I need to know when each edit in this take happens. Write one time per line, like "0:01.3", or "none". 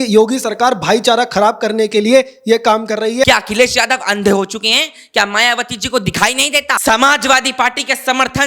0:03.3
0:06.8